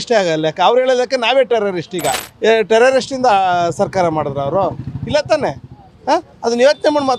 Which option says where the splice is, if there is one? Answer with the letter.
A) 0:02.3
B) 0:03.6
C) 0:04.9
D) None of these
A